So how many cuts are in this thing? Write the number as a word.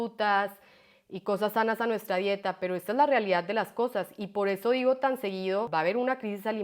one